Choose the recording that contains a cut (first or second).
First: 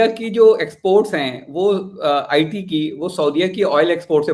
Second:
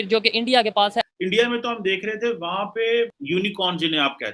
second